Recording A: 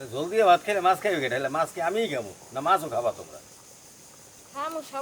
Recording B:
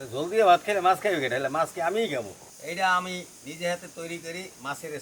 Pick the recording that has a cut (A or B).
B